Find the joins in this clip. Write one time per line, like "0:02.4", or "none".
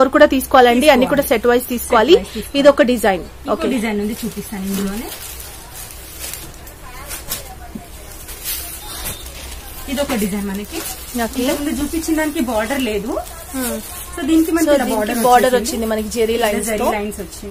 none